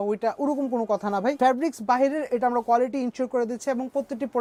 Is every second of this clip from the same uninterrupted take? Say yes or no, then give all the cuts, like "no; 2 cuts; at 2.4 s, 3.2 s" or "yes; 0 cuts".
yes; 0 cuts